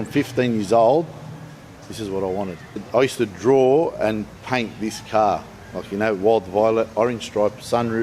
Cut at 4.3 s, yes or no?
yes